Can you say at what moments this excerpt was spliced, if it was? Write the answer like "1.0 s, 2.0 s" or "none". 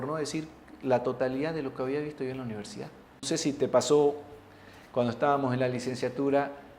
3.3 s